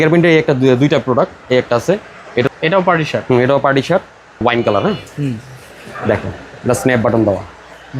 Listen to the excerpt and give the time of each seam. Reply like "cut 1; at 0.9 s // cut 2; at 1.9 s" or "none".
cut 1; at 2.5 s // cut 2; at 4.4 s